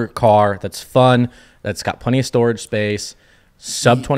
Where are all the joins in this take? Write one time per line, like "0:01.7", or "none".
none